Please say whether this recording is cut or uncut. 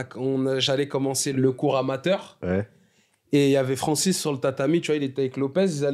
cut